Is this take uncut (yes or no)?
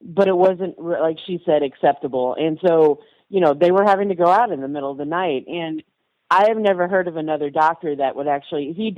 yes